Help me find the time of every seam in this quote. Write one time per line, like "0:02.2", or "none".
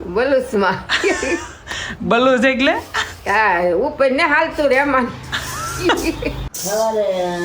0:06.5